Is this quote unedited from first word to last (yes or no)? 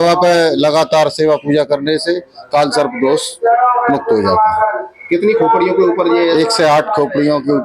yes